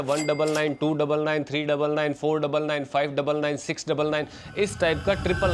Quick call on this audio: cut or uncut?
uncut